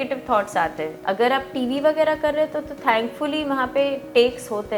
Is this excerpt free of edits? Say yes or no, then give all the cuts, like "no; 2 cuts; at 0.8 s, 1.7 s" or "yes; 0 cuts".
no; 1 cut; at 0.9 s